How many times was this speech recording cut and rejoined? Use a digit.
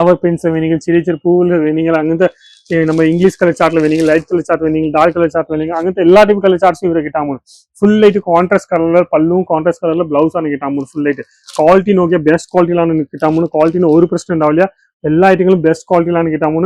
0